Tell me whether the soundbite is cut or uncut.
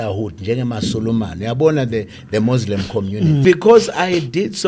cut